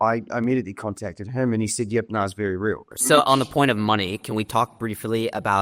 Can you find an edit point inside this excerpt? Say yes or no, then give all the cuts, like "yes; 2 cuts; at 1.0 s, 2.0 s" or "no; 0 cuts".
no; 0 cuts